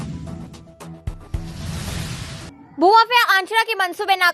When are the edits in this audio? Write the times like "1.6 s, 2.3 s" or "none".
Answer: 2.1 s